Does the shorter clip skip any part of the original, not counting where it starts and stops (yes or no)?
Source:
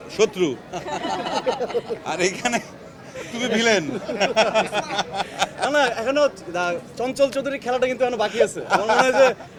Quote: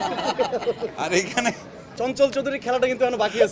yes